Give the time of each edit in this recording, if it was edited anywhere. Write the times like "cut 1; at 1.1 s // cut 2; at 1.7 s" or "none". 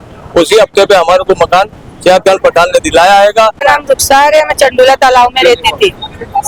none